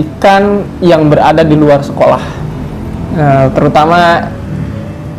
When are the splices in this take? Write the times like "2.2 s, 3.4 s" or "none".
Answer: none